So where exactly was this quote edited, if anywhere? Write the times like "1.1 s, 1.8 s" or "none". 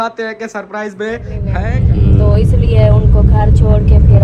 1.5 s

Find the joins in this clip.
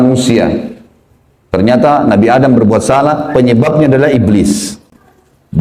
none

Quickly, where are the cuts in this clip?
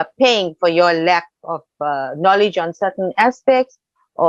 none

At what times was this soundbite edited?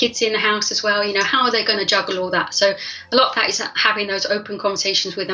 none

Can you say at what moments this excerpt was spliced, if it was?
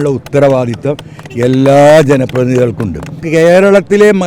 3.2 s

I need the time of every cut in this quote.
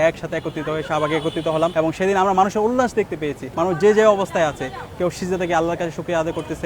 1.7 s, 3.4 s

